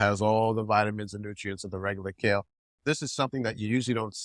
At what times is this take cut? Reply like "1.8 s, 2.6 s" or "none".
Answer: none